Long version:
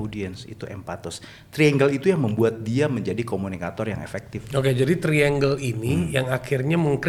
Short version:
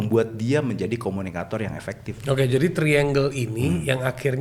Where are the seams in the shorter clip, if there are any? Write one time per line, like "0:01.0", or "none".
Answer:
none

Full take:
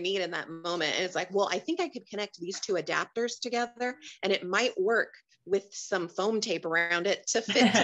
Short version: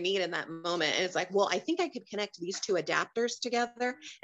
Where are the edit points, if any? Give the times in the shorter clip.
none

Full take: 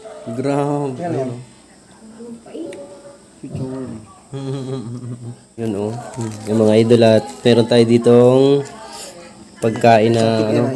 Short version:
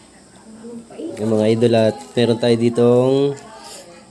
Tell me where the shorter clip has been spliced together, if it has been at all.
0:01.1

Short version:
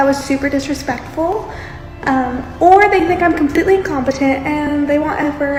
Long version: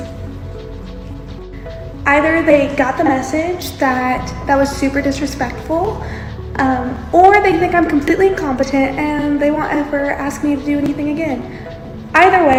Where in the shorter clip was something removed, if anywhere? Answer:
none

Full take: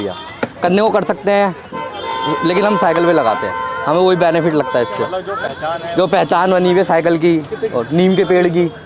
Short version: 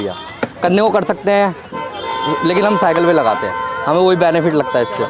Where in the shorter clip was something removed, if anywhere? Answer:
none

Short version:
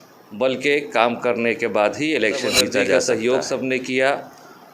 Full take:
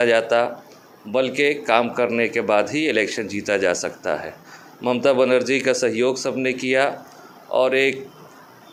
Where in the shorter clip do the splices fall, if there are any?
0:02.9

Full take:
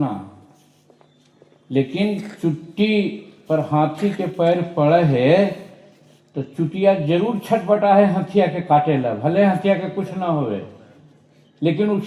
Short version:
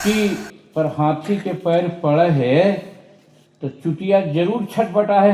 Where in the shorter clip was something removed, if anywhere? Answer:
none

